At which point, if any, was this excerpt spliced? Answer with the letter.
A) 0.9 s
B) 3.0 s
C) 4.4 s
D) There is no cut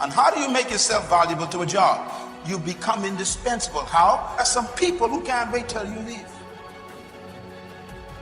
C